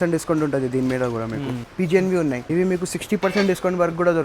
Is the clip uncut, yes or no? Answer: no